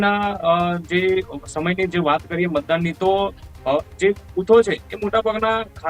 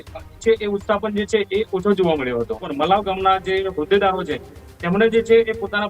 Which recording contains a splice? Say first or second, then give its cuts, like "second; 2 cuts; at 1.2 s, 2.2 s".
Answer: second; 1 cut; at 2.7 s